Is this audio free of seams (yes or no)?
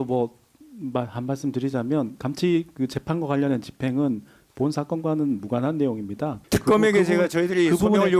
no